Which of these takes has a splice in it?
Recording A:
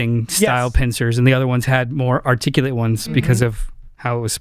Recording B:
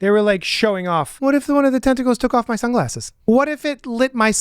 B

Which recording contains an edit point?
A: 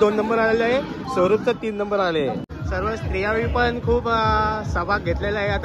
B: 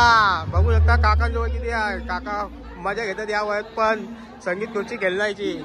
A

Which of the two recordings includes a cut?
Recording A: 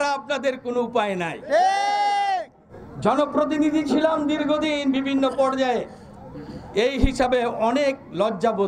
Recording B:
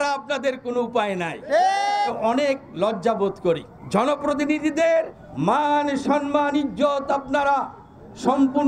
B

